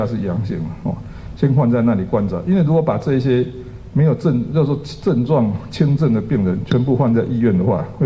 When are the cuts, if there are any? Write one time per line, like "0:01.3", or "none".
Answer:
none